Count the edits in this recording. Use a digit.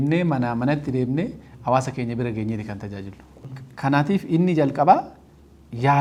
0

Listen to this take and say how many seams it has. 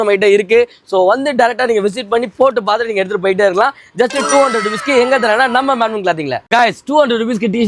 1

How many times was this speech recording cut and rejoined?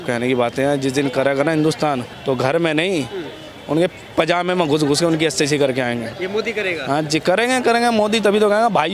2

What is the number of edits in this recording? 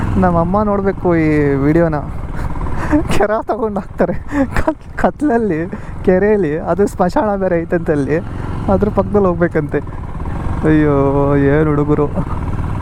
0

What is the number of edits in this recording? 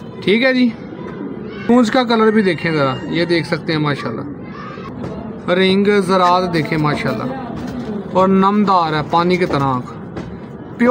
2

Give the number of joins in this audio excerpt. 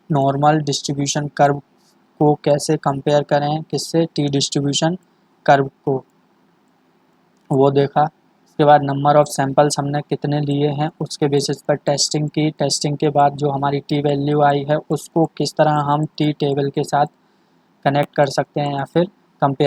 0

